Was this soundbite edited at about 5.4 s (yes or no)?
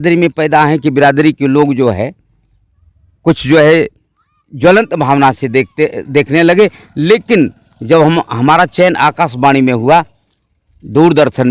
no